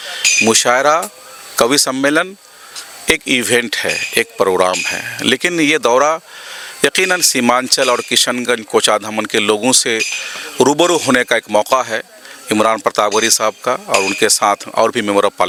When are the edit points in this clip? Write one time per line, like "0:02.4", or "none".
none

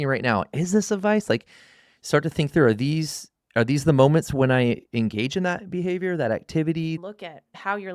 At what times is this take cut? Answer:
0:07.0

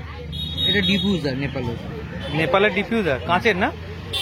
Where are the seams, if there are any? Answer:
none

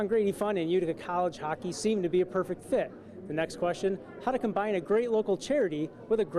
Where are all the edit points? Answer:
none

